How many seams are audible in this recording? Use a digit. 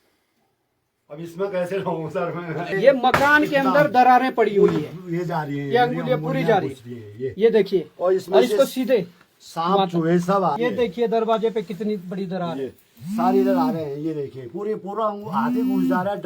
2